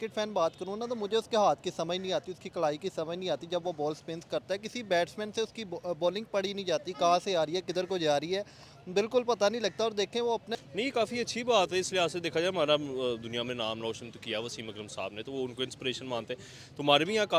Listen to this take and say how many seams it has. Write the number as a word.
one